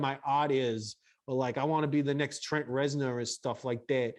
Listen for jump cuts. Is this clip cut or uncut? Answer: uncut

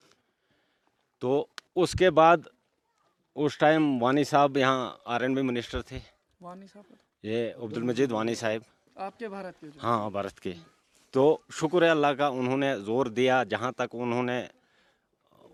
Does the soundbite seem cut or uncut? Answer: uncut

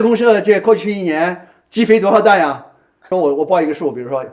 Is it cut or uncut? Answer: cut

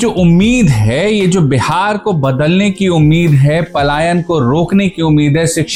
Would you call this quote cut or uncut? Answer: uncut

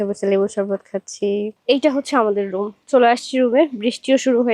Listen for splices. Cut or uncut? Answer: cut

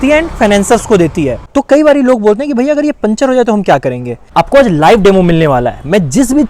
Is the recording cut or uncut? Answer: cut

